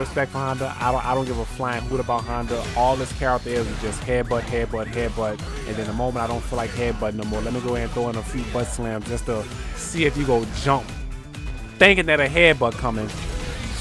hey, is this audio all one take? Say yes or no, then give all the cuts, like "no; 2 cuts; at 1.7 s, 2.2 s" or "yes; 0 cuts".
yes; 0 cuts